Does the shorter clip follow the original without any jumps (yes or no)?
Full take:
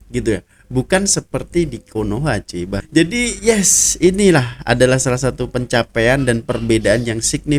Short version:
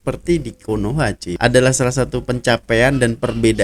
no